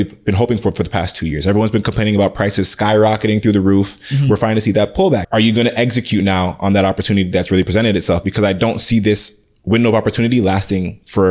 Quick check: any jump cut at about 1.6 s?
no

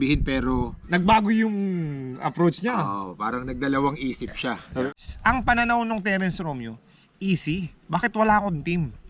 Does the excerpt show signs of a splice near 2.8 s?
no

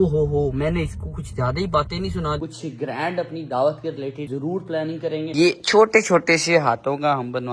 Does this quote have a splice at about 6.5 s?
no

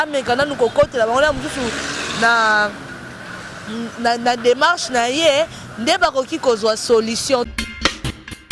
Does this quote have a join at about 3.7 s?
no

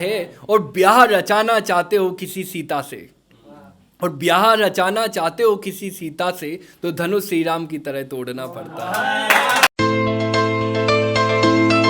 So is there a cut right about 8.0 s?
no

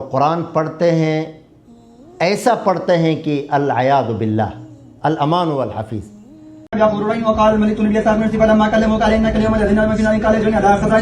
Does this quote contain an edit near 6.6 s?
yes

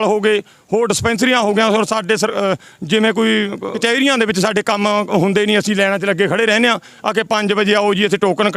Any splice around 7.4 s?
no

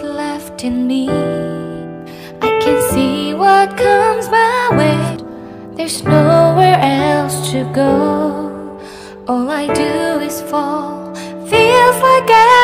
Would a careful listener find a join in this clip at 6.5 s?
no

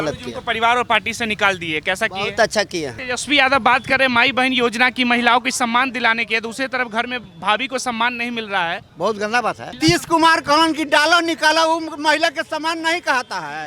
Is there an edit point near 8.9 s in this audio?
yes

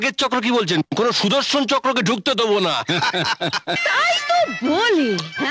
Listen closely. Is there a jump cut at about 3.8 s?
yes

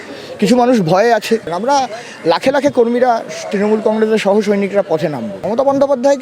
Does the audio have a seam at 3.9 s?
no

